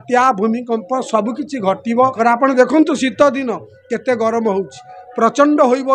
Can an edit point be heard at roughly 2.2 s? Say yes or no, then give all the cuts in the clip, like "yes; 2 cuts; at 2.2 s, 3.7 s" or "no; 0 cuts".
yes; 1 cut; at 2.2 s